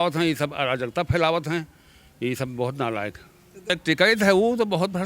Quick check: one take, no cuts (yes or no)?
no